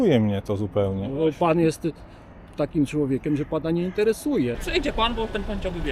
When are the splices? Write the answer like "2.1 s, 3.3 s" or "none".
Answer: 4.6 s